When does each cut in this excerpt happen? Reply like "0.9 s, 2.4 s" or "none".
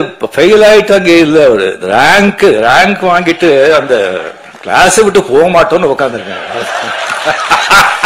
none